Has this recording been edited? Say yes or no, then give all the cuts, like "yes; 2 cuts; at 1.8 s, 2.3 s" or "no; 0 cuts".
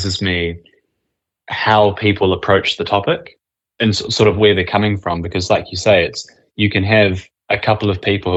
no; 0 cuts